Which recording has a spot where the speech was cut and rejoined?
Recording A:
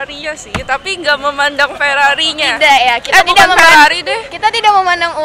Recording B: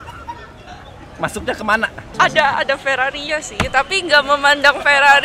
B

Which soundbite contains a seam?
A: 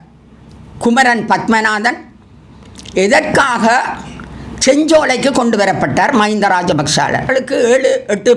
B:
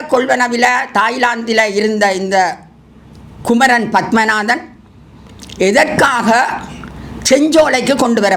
A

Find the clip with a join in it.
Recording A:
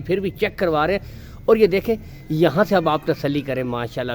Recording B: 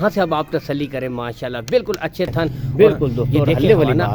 B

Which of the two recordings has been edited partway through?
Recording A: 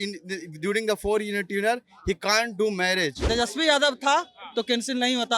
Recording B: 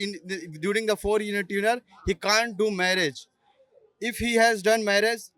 A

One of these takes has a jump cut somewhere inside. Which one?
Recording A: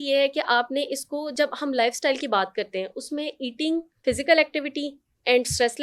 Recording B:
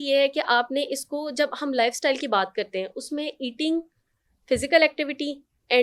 A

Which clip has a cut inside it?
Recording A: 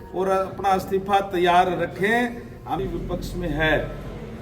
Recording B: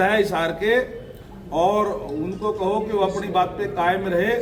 A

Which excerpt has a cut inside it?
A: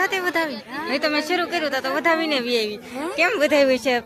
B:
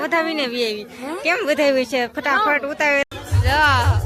B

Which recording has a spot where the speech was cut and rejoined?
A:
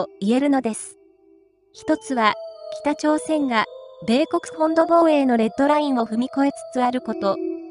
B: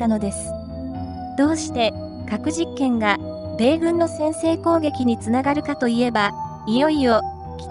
B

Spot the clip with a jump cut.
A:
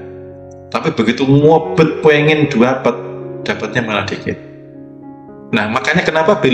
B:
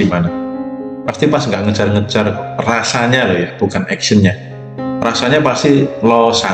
A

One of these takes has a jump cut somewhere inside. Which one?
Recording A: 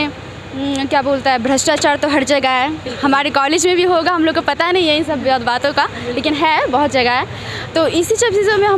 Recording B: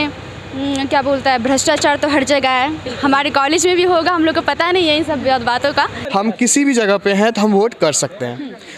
B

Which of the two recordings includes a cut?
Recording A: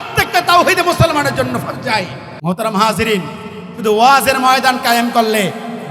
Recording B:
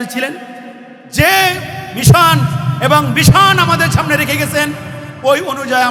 A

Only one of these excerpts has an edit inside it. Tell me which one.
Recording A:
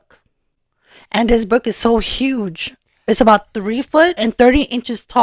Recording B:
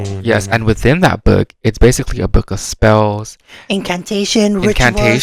A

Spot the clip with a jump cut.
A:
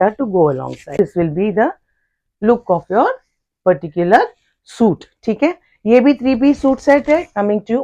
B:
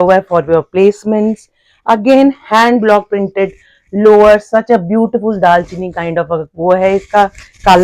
A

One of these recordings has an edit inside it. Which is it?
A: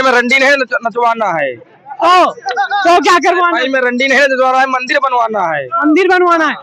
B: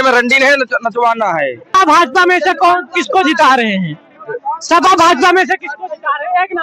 B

